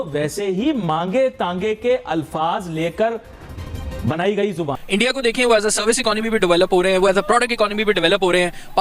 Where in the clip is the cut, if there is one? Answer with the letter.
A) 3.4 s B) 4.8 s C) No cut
B